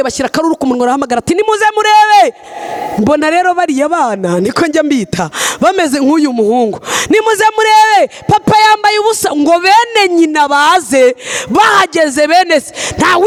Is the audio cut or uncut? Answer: uncut